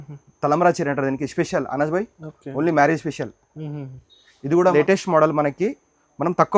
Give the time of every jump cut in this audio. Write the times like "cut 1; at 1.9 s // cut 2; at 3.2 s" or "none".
cut 1; at 4.7 s

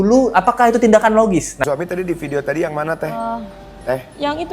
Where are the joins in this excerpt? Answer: cut 1; at 1.6 s

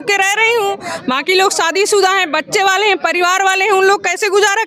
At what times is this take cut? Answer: none

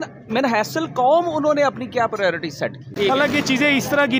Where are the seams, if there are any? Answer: cut 1; at 2.8 s

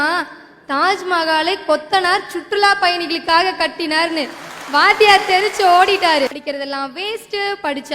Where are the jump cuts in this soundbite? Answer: cut 1; at 6.4 s

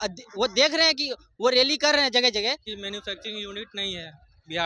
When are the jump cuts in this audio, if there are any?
cut 1; at 2.6 s

